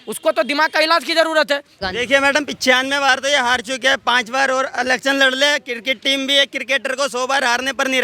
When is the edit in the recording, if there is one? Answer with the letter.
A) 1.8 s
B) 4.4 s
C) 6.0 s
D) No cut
A